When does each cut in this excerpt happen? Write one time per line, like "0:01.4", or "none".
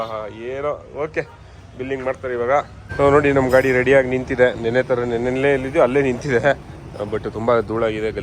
0:02.8